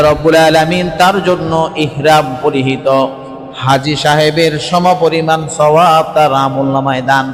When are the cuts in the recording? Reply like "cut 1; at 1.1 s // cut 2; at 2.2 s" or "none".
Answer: none